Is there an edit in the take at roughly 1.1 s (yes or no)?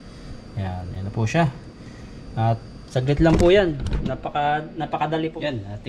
no